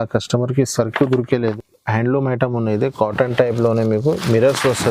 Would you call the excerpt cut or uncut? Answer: cut